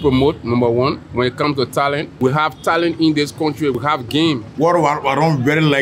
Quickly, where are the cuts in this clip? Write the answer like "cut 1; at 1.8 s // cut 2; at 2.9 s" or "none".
cut 1; at 1.0 s // cut 2; at 2.1 s // cut 3; at 3.9 s